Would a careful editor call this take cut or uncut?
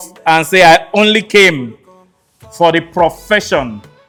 uncut